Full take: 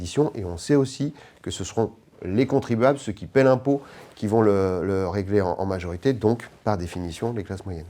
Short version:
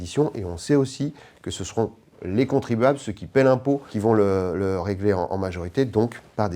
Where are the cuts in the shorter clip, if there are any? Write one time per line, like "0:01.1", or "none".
0:03.9

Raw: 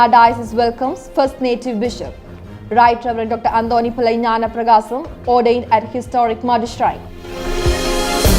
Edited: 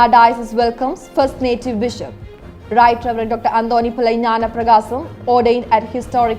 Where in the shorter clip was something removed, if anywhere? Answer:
none

